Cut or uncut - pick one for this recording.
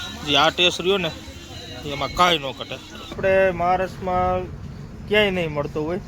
cut